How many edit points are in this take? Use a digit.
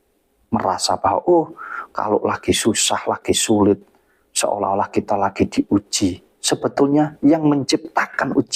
0